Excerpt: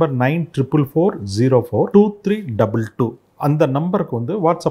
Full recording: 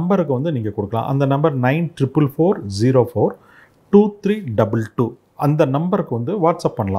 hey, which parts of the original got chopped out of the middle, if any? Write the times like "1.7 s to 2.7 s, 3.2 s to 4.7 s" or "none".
3.3 s to 3.9 s